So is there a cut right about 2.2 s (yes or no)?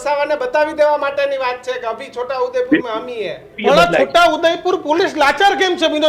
no